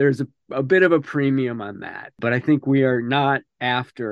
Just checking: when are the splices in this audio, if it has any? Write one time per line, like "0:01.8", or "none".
0:02.2

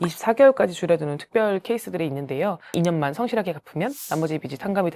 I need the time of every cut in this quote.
0:02.7

